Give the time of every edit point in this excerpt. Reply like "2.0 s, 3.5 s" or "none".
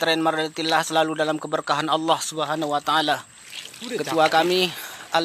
3.4 s